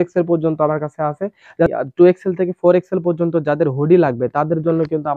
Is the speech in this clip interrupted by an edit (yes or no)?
yes